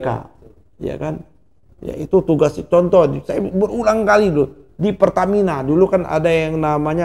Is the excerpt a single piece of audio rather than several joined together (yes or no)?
yes